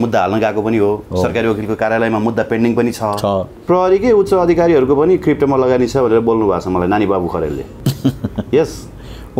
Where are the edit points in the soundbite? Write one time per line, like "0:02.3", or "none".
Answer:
0:03.5
0:07.7